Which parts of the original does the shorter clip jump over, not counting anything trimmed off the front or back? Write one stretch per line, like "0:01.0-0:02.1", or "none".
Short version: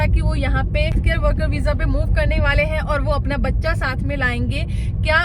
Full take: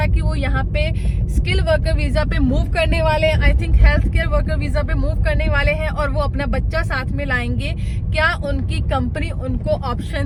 0:01.0-0:04.1